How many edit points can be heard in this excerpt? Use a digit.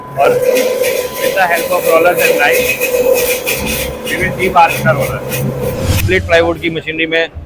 1